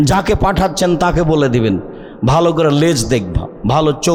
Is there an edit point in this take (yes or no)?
no